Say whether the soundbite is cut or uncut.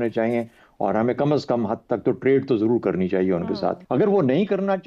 cut